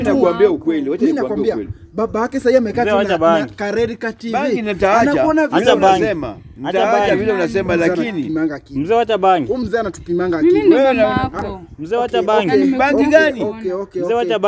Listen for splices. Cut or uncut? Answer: uncut